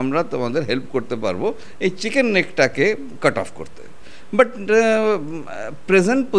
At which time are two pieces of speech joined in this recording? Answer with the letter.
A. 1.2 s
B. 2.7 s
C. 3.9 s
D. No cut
D